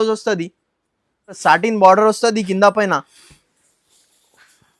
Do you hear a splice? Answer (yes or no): yes